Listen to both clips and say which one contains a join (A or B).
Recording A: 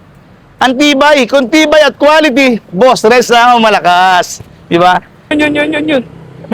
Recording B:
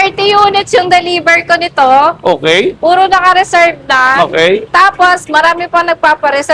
A